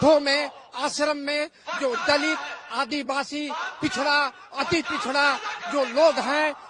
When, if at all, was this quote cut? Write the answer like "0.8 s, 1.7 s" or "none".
none